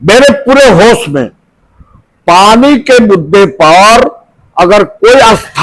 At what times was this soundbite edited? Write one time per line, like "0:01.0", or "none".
none